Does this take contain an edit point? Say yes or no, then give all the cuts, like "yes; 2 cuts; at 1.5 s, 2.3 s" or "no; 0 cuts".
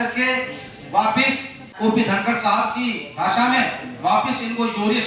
yes; 1 cut; at 1.7 s